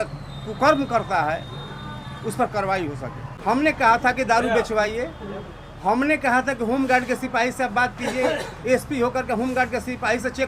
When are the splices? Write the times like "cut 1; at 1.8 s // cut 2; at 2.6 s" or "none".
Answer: cut 1; at 3.3 s